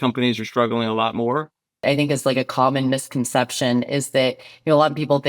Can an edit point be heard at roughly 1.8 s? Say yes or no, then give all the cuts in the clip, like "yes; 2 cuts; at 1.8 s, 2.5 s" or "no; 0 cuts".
yes; 1 cut; at 1.8 s